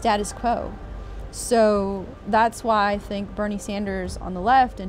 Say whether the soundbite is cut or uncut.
uncut